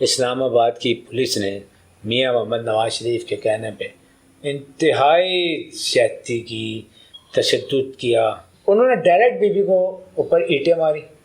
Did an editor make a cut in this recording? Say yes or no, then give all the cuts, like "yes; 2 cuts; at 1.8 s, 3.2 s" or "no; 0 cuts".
yes; 1 cut; at 8.5 s